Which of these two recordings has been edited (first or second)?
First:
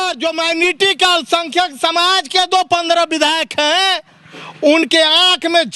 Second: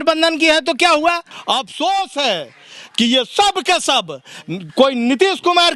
second